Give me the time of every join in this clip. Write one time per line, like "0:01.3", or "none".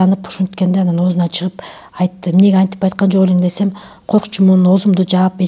none